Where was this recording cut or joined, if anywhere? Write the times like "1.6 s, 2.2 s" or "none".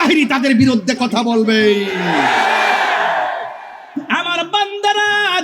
3.8 s

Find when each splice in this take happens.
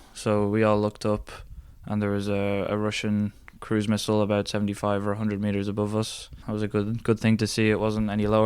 6.4 s

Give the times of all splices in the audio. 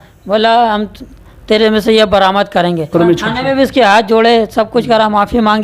2.9 s

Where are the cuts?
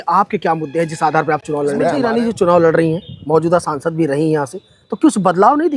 1.9 s

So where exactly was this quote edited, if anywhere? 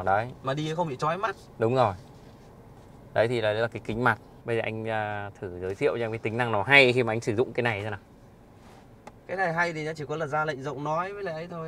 4.4 s

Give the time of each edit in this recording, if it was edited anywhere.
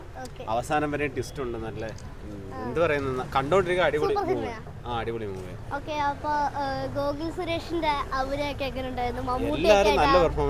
none

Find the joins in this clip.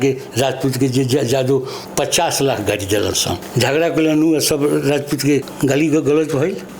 1.8 s, 3.4 s, 5.5 s

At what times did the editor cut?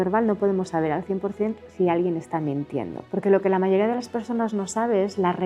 3.0 s

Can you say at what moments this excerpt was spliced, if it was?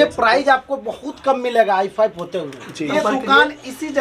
2.9 s

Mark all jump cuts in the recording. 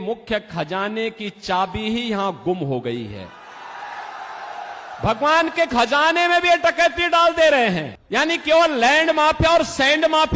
7.9 s

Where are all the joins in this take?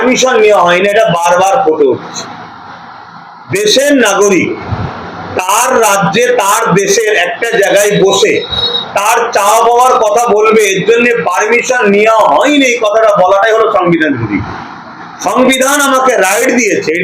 none

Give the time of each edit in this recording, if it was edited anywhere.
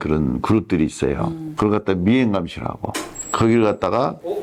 none

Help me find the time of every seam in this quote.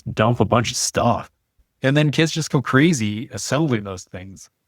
1.4 s

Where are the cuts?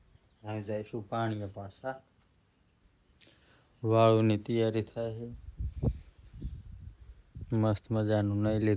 none

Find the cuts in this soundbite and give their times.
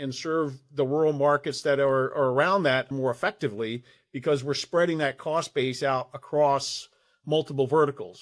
2.9 s

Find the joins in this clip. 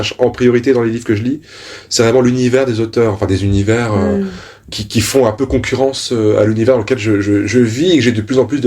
none

